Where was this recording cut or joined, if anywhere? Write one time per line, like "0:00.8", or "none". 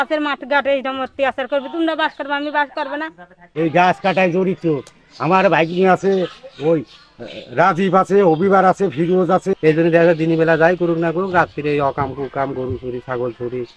0:03.4
0:09.5

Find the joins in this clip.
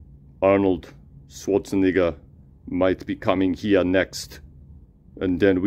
none

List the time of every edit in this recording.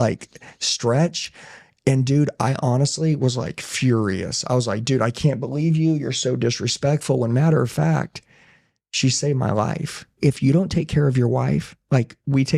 0:10.2

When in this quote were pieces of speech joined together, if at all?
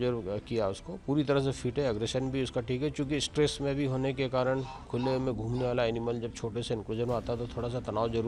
none

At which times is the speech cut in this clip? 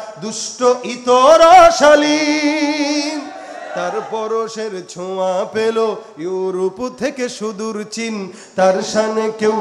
none

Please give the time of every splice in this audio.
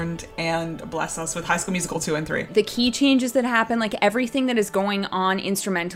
0:02.5

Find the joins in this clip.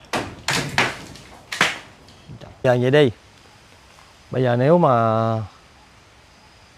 0:02.6

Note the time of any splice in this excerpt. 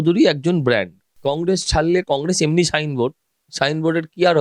0:01.0

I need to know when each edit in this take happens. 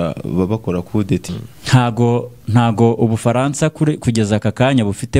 0:01.2

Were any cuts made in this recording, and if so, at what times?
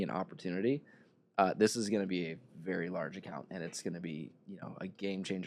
none

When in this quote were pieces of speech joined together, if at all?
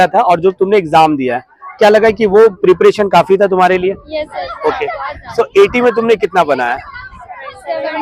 none

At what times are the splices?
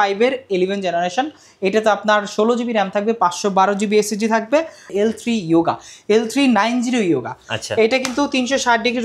0:04.8

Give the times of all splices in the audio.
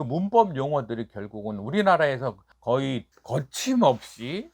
0:03.1

